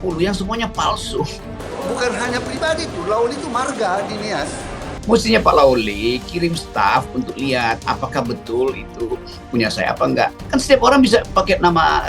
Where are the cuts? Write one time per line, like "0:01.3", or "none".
0:01.4
0:04.9